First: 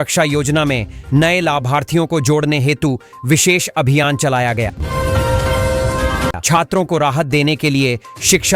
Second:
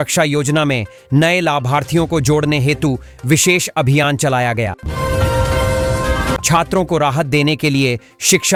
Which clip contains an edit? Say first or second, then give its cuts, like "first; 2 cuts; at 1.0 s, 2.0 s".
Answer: first; 2 cuts; at 4.8 s, 6.4 s